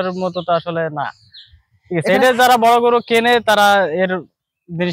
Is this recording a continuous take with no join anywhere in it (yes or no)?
yes